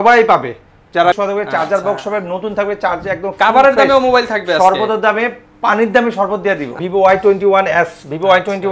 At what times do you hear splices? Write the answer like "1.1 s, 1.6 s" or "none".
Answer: 1.2 s, 6.8 s